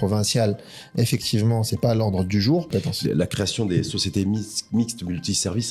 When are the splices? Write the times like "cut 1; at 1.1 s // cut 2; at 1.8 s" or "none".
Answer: cut 1; at 2.7 s